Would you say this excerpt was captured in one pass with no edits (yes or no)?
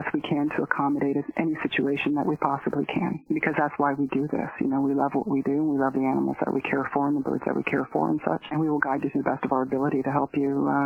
no